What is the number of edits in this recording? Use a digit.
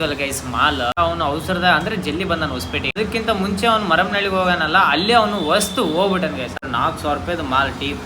3